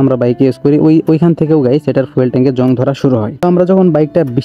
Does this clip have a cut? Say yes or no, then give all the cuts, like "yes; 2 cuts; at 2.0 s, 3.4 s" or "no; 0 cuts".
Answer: yes; 1 cut; at 3.3 s